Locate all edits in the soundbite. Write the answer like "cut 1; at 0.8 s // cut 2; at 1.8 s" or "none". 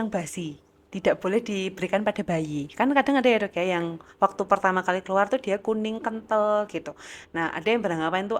none